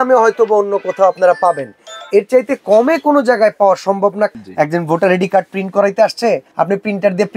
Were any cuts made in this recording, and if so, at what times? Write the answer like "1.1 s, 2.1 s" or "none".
4.3 s, 6.5 s